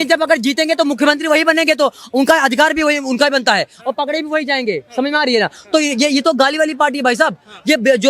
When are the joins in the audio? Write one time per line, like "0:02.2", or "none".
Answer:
none